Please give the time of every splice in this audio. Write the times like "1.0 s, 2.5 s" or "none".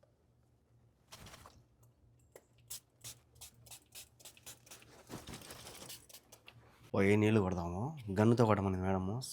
6.8 s